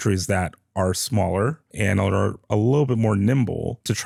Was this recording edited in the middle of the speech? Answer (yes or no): no